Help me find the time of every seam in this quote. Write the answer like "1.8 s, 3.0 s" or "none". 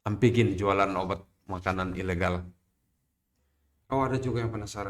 3.3 s